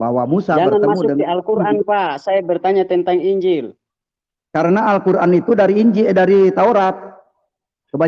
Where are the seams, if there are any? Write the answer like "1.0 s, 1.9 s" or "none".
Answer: none